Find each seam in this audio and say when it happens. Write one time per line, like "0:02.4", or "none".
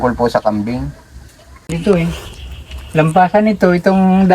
0:01.7